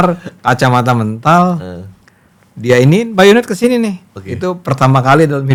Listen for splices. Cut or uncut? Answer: uncut